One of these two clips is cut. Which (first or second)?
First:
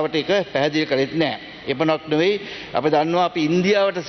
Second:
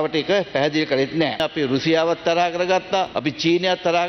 second